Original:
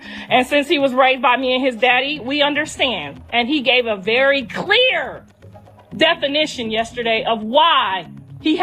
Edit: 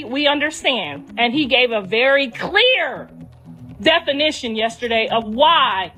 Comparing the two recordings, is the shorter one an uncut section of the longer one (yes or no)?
yes